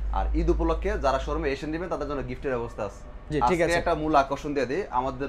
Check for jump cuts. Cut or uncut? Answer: uncut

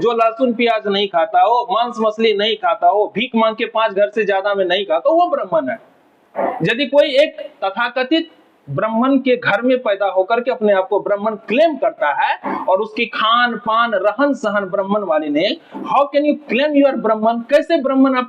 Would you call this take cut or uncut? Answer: uncut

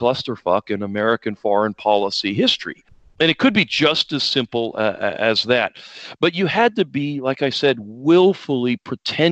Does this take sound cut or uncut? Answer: uncut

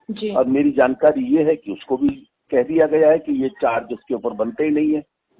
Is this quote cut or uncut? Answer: uncut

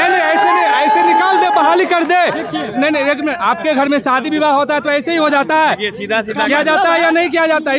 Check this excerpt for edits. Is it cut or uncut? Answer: uncut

